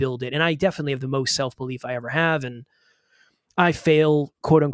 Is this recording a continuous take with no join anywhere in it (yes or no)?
yes